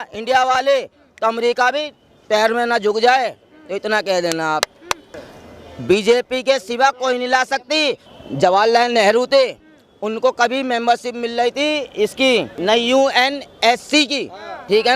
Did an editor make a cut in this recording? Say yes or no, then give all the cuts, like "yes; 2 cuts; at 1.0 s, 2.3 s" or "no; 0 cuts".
yes; 2 cuts; at 5.1 s, 8.0 s